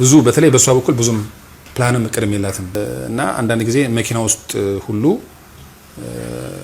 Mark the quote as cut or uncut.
cut